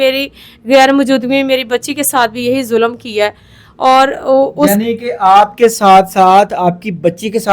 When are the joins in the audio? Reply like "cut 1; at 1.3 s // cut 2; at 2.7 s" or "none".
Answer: none